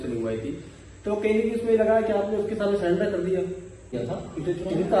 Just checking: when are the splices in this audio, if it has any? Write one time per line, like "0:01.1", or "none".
0:03.9